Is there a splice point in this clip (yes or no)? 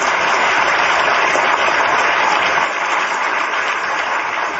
yes